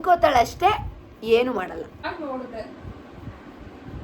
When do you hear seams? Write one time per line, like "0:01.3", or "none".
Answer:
0:02.0